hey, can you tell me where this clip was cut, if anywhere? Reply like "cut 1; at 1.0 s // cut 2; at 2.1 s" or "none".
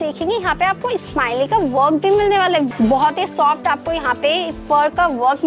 cut 1; at 2.7 s